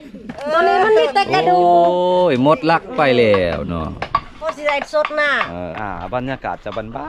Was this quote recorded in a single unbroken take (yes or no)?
no